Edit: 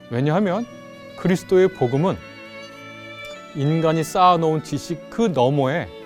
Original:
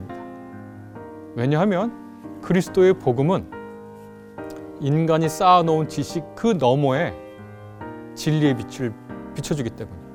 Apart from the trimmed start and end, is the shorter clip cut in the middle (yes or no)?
no